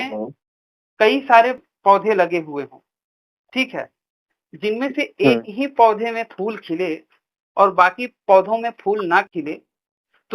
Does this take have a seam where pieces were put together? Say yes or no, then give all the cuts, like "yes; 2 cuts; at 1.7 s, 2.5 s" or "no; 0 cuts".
yes; 1 cut; at 1.7 s